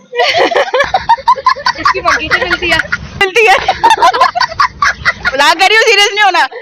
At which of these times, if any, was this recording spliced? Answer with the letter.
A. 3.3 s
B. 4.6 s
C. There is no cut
A